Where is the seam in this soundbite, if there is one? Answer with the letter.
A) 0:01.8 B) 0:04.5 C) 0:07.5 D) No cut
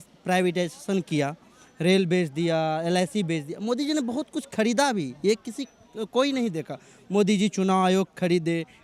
D